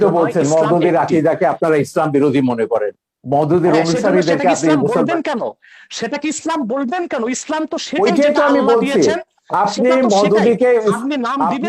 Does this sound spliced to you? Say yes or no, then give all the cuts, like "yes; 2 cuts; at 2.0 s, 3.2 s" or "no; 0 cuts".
no; 0 cuts